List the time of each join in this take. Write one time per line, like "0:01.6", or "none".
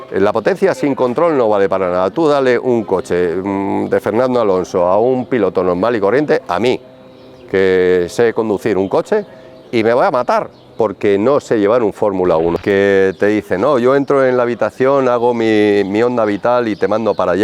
0:12.6